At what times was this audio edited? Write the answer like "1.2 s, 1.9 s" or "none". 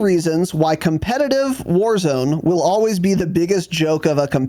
none